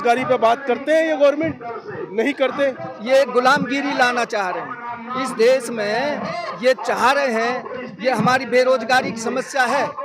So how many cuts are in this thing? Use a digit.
1